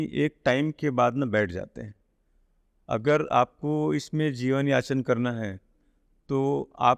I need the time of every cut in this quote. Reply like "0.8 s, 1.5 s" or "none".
none